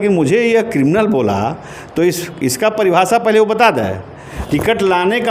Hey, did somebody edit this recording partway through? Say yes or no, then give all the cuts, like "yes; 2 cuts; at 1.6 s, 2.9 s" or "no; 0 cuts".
yes; 1 cut; at 4.3 s